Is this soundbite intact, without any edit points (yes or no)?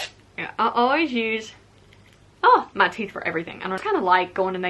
no